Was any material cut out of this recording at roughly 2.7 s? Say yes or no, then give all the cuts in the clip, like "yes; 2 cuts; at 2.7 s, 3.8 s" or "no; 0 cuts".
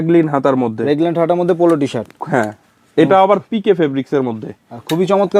no; 0 cuts